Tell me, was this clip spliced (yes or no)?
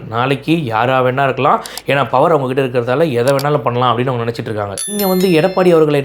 yes